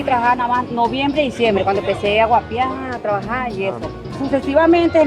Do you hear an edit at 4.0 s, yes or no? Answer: yes